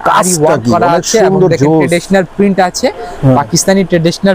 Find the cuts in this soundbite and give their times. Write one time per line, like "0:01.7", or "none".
none